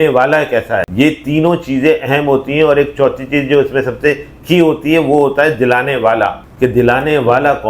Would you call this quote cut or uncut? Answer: cut